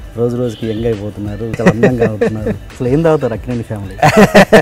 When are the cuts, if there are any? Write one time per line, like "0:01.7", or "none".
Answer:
0:01.6
0:02.7